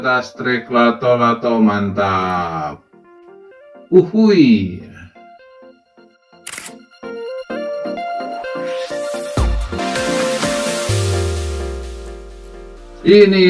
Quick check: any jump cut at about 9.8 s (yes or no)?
yes